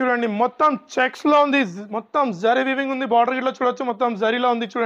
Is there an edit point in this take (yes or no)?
no